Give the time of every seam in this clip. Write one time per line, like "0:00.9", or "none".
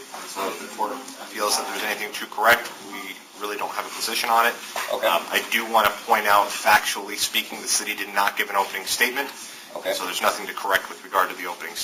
none